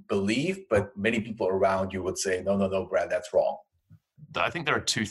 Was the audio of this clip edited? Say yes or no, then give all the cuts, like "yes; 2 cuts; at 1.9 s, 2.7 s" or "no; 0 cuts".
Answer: yes; 1 cut; at 4.2 s